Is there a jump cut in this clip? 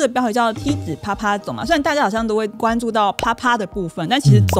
no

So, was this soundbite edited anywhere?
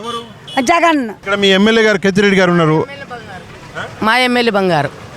yes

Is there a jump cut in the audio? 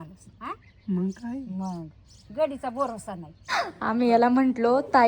yes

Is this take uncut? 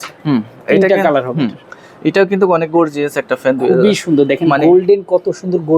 yes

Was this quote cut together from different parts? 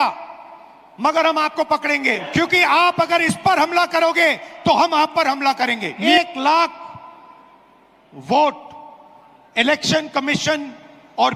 yes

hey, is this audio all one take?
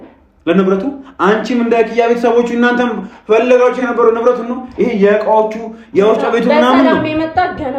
yes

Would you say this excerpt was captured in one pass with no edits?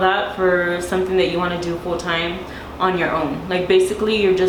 yes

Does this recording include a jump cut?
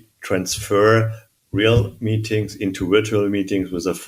no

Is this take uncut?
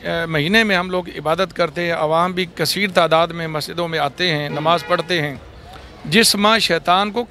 yes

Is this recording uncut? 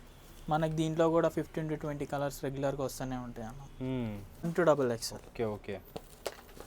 no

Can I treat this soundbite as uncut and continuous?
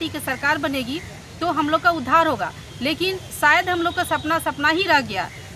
yes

